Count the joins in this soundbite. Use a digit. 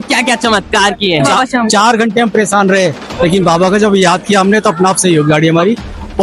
1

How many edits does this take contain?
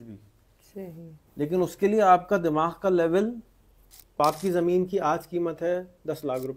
1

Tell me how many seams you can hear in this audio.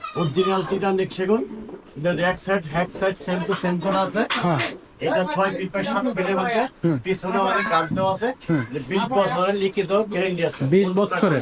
0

